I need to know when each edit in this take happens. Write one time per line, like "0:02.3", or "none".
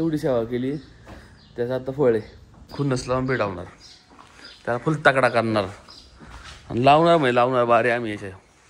0:02.7